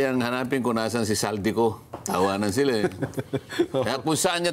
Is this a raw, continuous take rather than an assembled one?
yes; 0 cuts

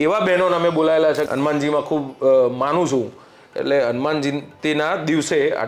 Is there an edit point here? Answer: yes; 1 cut; at 1.2 s

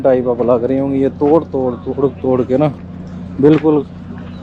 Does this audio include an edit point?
no; 0 cuts

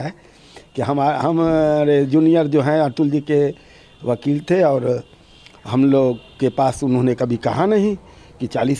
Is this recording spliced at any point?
no; 0 cuts

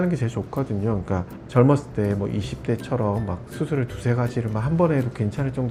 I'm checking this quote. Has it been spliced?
no; 0 cuts

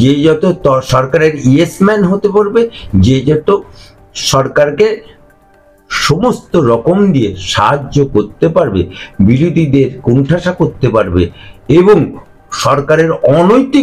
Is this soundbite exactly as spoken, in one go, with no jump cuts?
yes; 0 cuts

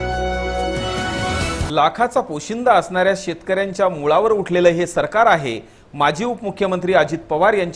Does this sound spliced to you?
yes; 1 cut; at 1.7 s

